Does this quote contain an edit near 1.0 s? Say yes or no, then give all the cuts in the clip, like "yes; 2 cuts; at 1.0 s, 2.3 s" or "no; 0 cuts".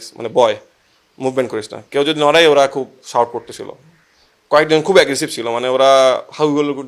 no; 0 cuts